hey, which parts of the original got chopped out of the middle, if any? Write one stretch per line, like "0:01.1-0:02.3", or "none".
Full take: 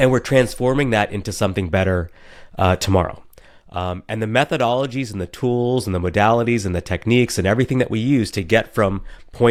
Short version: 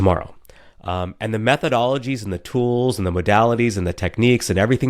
none